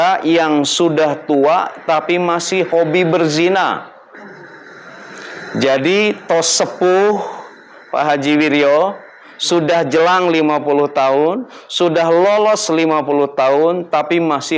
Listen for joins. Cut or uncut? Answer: uncut